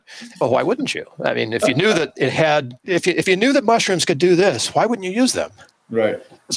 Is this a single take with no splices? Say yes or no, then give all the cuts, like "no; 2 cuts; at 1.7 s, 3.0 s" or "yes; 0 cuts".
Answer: no; 1 cut; at 2.9 s